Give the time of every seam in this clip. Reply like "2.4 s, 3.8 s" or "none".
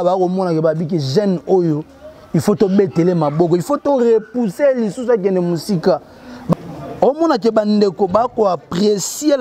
6.5 s